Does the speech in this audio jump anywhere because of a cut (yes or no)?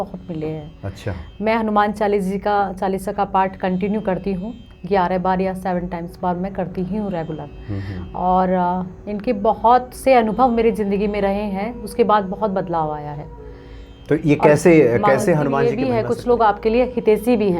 yes